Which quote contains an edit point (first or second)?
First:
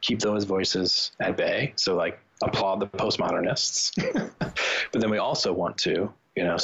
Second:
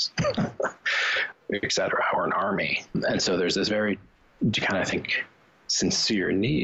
second